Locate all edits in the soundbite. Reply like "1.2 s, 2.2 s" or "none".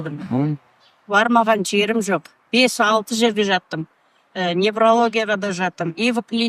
none